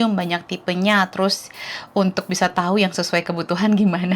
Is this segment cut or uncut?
uncut